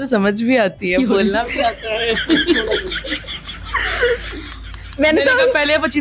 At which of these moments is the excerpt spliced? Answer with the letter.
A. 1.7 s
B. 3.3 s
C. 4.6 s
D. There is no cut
D